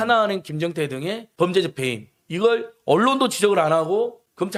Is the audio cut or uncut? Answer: uncut